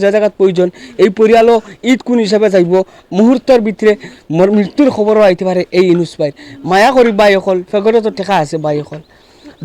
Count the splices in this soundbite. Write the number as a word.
zero